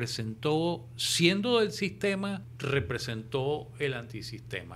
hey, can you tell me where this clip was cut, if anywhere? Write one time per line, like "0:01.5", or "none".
0:02.5